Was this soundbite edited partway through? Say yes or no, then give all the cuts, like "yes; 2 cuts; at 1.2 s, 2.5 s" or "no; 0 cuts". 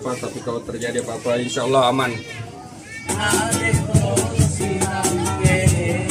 yes; 1 cut; at 3.1 s